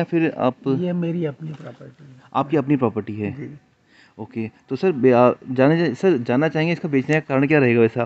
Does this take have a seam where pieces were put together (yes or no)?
no